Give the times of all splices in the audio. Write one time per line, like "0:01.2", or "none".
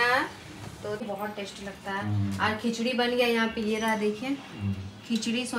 0:01.0